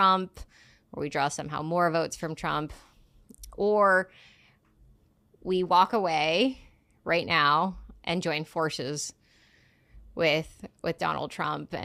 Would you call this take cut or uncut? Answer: uncut